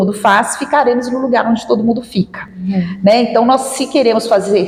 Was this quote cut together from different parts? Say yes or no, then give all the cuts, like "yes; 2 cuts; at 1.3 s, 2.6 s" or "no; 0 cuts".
no; 0 cuts